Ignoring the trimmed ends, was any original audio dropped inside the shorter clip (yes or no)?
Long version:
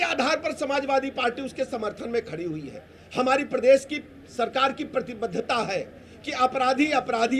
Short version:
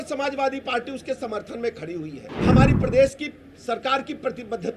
yes